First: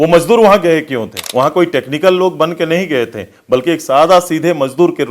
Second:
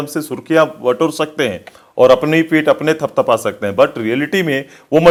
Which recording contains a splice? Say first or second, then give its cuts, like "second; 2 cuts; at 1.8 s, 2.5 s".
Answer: first; 1 cut; at 1.2 s